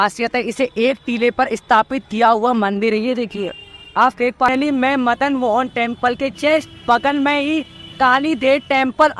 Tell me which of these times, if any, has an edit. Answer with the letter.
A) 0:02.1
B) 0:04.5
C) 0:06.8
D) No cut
B